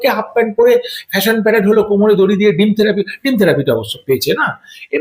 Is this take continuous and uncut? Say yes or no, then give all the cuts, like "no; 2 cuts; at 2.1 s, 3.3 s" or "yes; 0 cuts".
yes; 0 cuts